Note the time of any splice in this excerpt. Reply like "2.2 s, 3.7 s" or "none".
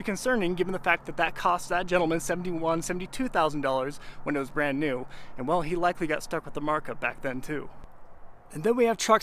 none